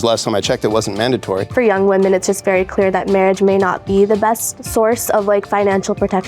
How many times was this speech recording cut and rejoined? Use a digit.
1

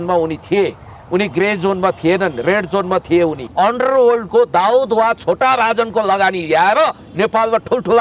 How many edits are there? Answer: 1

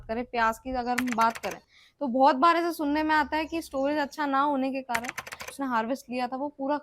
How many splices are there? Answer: 1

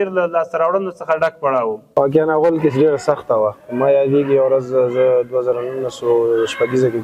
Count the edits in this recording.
1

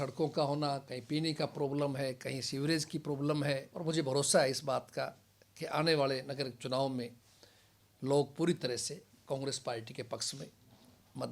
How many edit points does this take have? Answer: 1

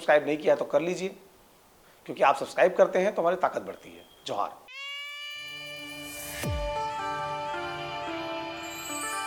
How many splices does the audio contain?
0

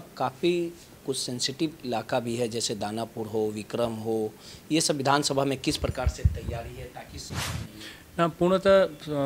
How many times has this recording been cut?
1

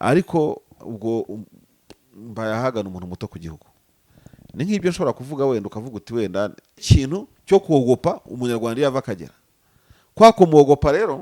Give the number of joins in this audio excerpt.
1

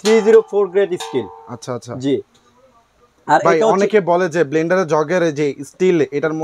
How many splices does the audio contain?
0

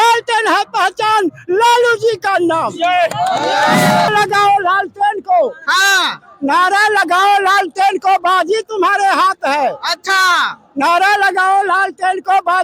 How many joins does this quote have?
1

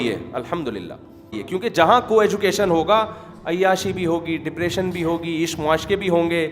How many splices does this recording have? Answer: 1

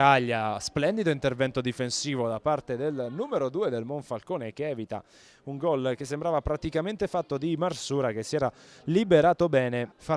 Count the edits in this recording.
1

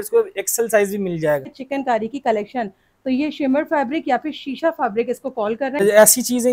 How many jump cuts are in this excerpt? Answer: 2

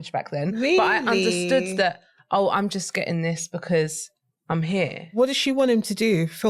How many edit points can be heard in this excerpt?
1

